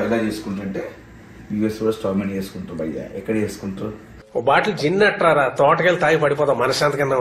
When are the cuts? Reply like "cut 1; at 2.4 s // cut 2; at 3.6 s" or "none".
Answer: none